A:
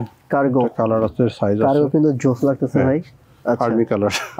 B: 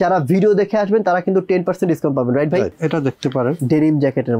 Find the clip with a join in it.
B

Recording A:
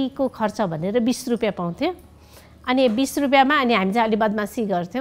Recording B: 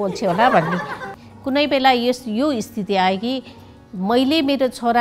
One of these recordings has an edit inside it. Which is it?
B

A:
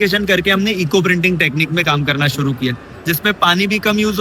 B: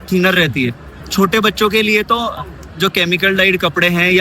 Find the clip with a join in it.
B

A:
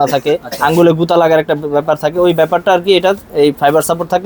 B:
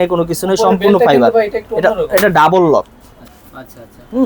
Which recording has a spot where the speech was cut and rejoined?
B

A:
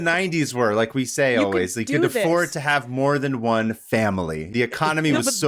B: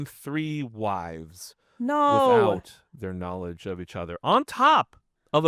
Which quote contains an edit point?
A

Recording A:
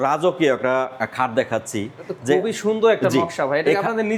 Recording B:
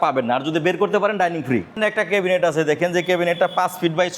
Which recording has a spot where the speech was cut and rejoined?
B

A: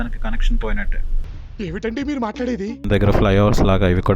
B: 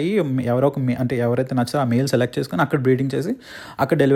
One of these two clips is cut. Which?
A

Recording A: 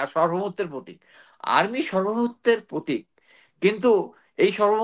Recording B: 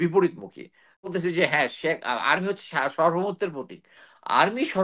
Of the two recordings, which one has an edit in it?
B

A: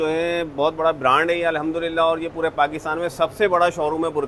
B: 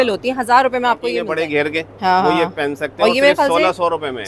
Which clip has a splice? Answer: B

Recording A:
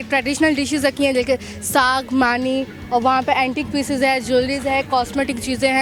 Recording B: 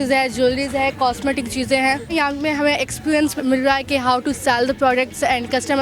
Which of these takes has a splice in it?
B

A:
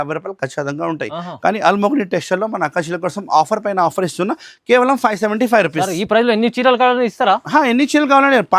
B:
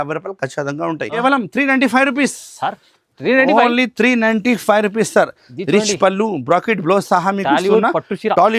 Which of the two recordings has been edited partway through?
B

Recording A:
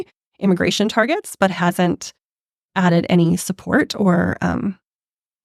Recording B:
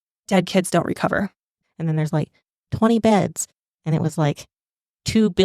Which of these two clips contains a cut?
B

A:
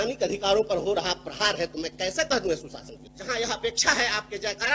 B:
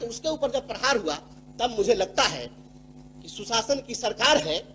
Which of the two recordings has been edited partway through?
A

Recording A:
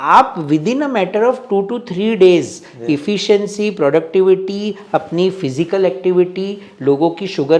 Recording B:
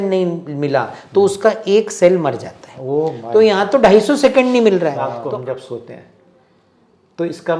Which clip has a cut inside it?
B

